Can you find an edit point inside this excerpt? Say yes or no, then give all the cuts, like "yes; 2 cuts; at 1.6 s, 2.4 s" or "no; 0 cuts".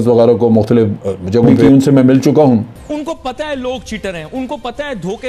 yes; 2 cuts; at 1.6 s, 2.8 s